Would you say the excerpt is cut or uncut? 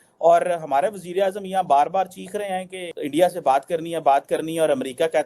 uncut